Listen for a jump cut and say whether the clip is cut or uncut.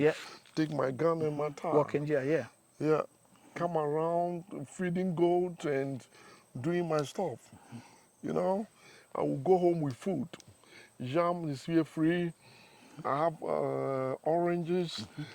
uncut